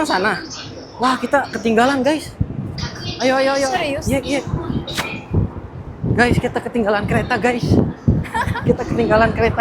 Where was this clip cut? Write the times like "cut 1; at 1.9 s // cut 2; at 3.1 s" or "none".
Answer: none